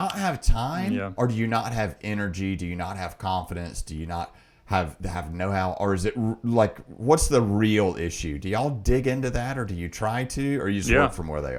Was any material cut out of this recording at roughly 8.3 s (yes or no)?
no